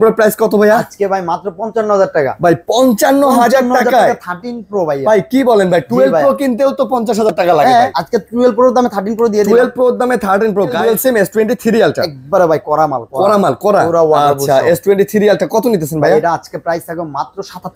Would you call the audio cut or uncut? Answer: cut